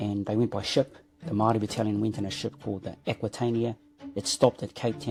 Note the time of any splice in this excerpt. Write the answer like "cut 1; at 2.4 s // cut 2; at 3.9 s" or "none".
none